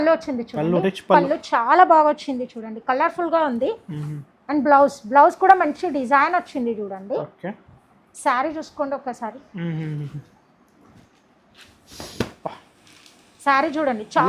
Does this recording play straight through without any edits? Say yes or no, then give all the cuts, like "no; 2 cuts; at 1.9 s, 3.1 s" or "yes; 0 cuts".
yes; 0 cuts